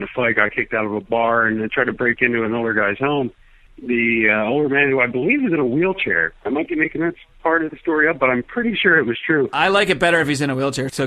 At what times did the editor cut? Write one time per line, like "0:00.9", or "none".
none